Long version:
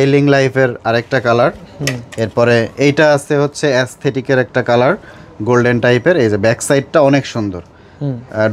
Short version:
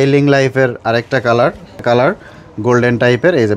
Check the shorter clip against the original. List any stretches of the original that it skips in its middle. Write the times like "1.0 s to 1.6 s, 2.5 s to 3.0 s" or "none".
1.8 s to 4.6 s